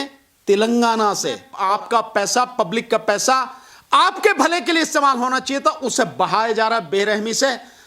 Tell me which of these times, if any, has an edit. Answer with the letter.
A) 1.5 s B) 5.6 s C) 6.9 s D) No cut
A